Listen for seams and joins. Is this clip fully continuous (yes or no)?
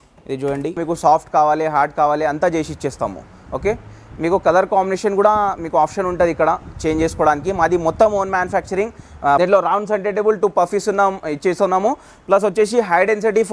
no